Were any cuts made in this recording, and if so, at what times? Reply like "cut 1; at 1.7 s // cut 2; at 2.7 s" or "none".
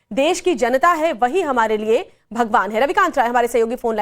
cut 1; at 2.7 s